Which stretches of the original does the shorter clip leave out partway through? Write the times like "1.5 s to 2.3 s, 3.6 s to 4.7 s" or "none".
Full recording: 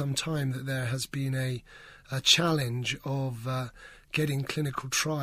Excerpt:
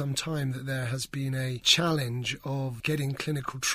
1.7 s to 2.3 s, 3.4 s to 4.1 s